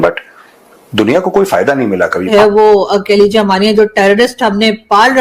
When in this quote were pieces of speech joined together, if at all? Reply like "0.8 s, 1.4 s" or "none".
2.3 s

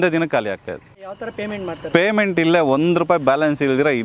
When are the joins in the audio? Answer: 1.1 s

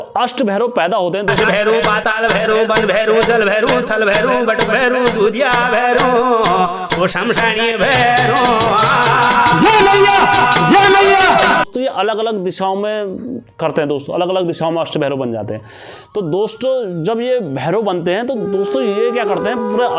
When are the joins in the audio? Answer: none

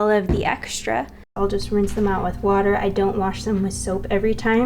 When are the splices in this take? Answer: 1.3 s

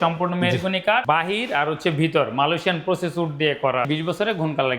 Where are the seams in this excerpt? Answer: 1.0 s, 3.9 s

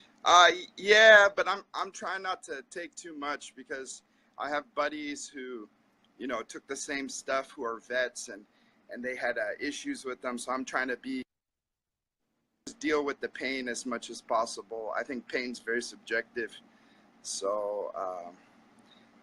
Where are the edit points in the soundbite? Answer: 4.7 s

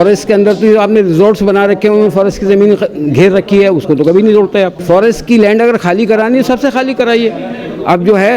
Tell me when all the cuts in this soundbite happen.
4.8 s

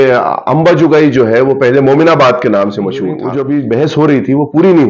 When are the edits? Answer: 3.2 s

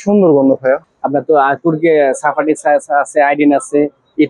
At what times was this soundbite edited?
0.9 s

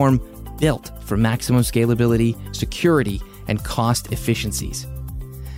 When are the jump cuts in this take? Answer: none

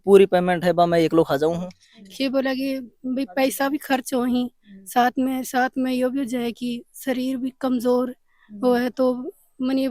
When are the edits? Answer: 1.8 s

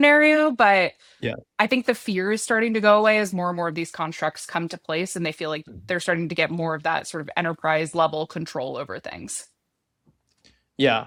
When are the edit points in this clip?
none

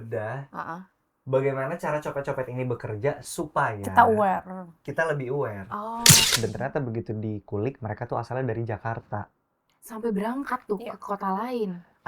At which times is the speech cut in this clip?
6.2 s

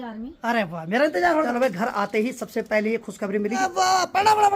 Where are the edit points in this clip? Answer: 1.5 s, 3.6 s

